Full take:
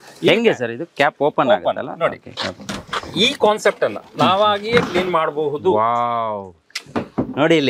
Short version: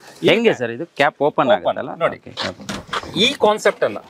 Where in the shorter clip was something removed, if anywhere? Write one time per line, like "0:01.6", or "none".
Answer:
none